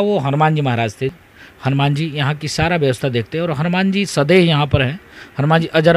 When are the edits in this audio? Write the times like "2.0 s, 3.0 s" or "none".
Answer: 1.0 s